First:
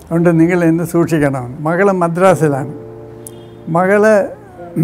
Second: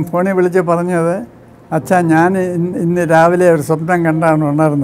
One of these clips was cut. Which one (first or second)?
first